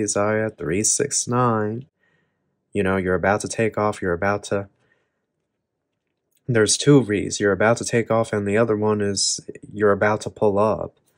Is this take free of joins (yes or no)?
yes